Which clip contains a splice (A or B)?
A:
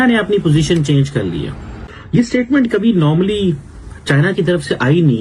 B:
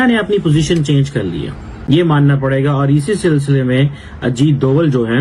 A